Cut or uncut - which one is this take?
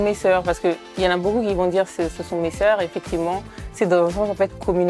uncut